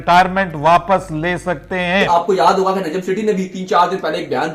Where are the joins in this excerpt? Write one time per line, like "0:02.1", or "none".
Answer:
0:02.0